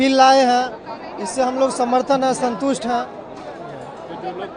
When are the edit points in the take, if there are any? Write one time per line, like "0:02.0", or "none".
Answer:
none